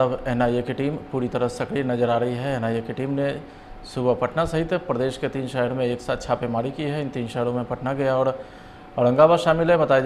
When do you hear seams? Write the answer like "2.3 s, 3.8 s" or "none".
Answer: none

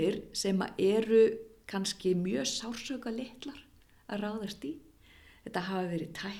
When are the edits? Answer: none

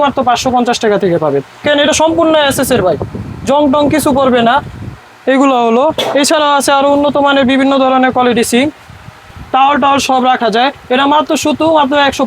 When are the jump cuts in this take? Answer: 1.6 s, 9.3 s

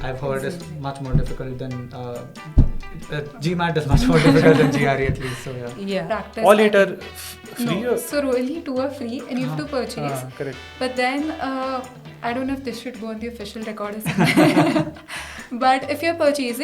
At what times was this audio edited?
6.1 s

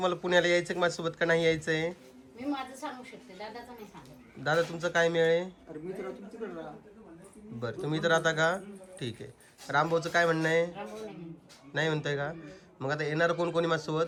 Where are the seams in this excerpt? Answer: none

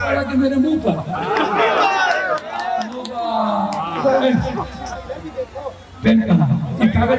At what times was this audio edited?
none

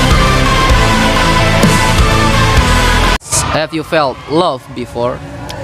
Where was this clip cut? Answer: 3.2 s

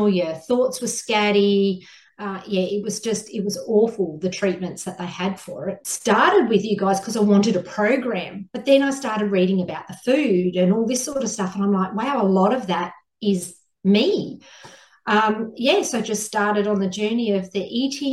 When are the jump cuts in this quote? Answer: 5.9 s

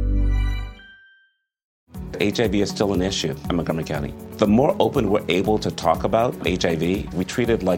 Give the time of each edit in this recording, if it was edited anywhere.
1.7 s

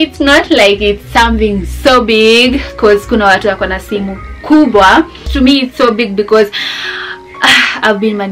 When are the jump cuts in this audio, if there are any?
none

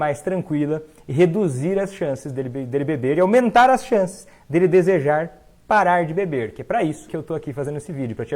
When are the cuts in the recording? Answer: 7.1 s

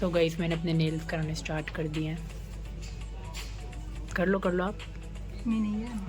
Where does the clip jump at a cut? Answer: none

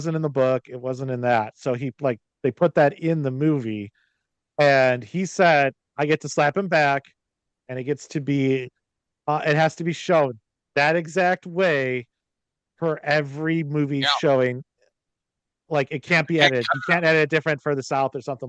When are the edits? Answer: none

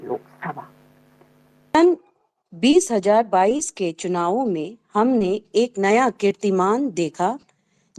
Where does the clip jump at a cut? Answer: 1.8 s

